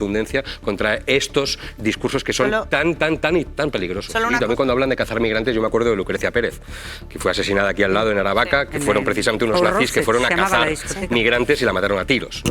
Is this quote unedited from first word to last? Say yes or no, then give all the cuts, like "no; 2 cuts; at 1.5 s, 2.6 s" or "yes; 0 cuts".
no; 1 cut; at 4.3 s